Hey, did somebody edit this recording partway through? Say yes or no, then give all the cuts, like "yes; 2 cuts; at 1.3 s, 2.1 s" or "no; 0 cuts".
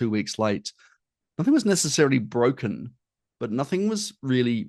no; 0 cuts